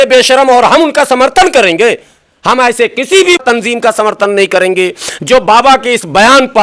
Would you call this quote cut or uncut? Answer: cut